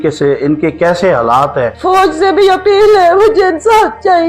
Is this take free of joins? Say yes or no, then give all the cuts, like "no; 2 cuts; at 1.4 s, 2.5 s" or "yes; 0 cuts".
no; 1 cut; at 1.7 s